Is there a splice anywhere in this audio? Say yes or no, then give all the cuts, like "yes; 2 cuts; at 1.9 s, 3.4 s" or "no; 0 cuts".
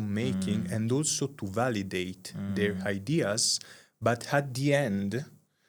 no; 0 cuts